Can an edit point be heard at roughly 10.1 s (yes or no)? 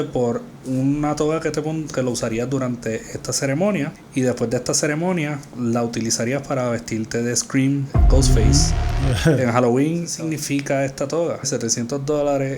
yes